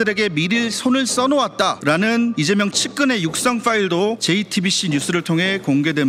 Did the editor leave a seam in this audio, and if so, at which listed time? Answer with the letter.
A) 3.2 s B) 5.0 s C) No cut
C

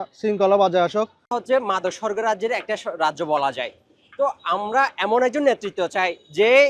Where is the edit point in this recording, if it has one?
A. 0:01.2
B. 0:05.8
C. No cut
C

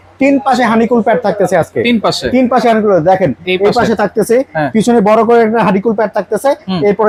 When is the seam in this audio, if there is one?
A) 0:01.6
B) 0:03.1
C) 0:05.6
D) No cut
D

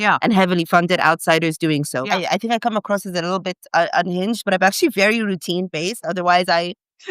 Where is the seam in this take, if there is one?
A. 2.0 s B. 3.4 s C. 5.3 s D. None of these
A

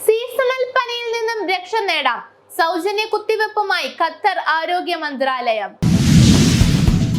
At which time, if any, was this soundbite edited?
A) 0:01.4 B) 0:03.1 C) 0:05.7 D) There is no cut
C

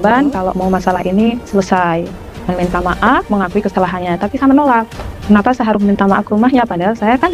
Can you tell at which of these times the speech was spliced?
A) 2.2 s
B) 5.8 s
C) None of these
A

